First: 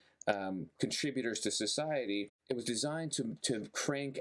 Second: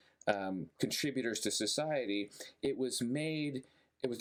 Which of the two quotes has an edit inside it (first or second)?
first